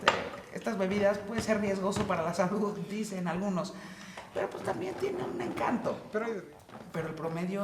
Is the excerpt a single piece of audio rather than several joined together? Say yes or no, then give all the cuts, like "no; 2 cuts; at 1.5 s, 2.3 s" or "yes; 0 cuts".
no; 1 cut; at 6.4 s